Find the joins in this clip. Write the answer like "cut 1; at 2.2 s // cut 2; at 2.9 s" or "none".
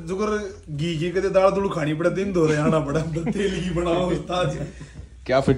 none